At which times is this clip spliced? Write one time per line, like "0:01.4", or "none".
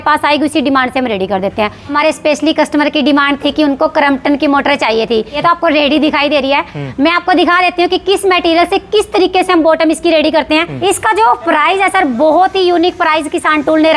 0:01.8
0:05.3
0:10.7